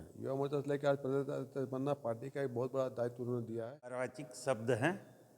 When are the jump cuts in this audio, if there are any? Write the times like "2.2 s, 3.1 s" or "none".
4.2 s